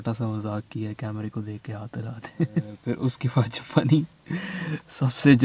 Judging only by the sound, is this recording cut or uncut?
cut